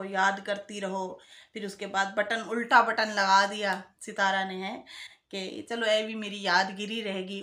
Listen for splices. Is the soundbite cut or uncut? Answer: uncut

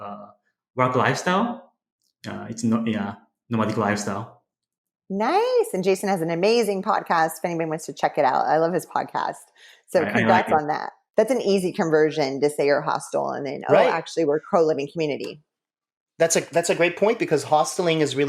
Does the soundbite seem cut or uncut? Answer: cut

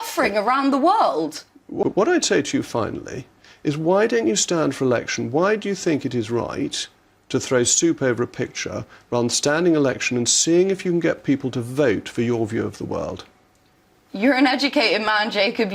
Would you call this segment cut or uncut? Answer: cut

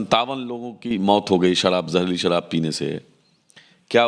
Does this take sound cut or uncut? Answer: uncut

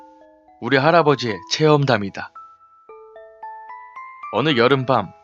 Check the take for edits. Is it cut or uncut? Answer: uncut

